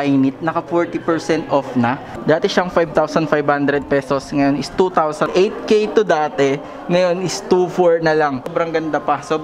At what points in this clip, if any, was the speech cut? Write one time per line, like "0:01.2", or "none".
0:02.1
0:05.3
0:08.5